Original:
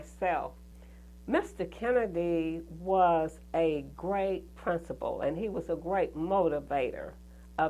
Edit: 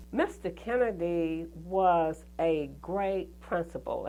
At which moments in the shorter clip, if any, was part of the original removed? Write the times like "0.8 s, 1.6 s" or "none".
none